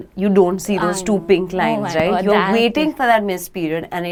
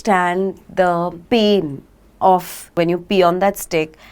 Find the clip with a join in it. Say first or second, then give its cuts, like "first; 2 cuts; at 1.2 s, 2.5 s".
second; 2 cuts; at 1.2 s, 2.8 s